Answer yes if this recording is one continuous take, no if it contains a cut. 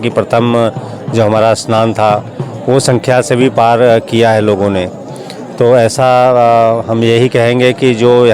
yes